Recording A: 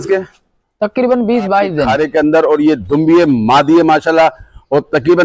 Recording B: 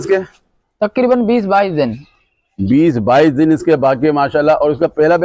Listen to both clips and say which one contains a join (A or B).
A